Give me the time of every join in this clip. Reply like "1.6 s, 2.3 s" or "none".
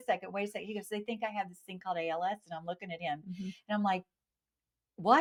none